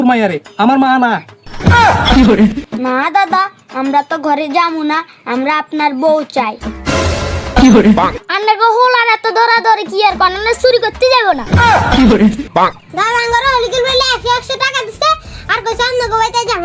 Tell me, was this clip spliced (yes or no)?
yes